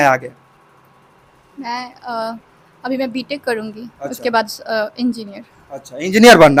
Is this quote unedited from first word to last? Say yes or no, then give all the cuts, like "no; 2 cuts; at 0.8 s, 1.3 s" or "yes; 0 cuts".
yes; 0 cuts